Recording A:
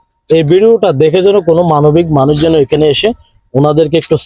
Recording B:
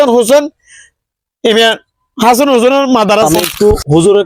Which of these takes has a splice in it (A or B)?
B